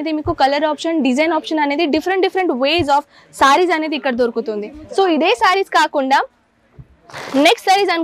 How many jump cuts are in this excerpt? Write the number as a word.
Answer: zero